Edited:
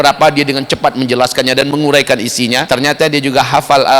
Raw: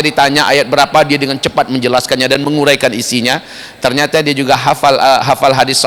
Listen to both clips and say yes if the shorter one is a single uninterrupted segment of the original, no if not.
no